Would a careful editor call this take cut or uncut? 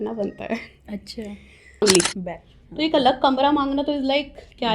cut